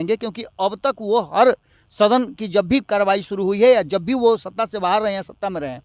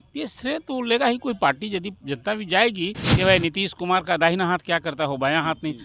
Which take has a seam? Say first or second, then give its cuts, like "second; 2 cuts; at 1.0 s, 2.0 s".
second; 1 cut; at 3.0 s